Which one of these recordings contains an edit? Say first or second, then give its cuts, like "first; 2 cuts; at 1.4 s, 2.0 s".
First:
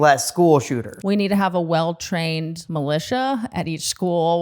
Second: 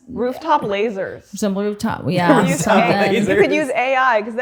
first; 2 cuts; at 0.9 s, 2.6 s